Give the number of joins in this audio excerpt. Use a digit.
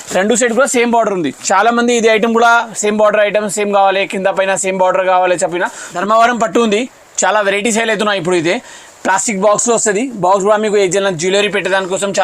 1